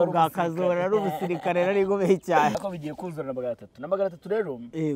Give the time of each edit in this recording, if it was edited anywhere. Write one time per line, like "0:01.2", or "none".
0:02.6